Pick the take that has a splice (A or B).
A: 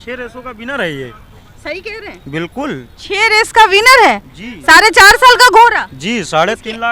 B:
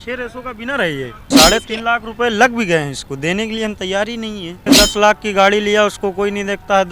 B